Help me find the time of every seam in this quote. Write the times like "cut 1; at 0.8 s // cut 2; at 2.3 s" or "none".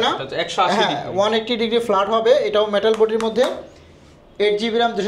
none

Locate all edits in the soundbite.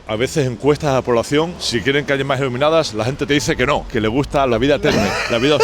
cut 1; at 1.6 s // cut 2; at 4.1 s

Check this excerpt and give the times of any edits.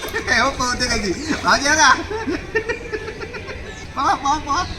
cut 1; at 3.8 s

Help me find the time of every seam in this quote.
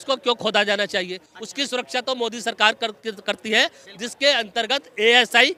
none

